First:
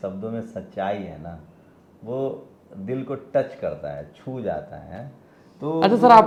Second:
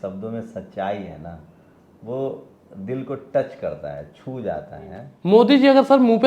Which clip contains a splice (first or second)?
second